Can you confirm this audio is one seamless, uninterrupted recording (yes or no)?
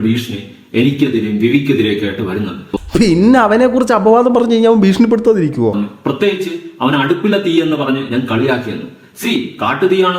no